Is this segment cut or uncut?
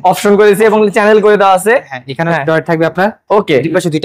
uncut